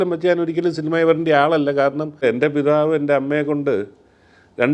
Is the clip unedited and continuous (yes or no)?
no